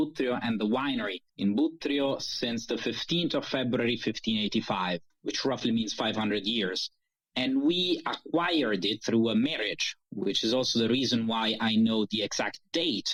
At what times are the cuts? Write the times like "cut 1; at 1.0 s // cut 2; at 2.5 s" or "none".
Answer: none